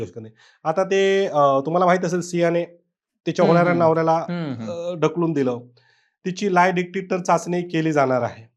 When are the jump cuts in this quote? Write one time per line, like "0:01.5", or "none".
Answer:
none